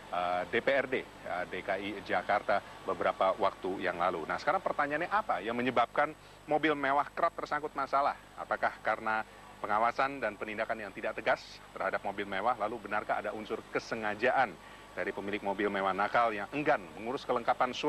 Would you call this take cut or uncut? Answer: uncut